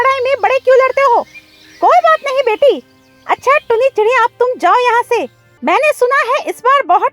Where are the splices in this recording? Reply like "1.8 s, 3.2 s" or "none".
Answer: 5.4 s